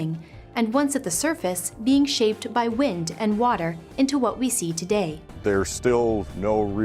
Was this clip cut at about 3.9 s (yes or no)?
no